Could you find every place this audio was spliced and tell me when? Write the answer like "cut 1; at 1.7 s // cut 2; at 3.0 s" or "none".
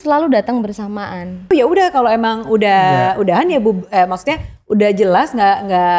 cut 1; at 1.5 s